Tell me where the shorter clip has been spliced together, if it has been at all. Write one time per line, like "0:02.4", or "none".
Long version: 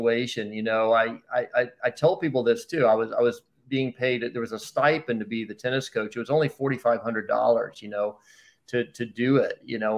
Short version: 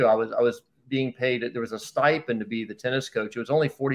none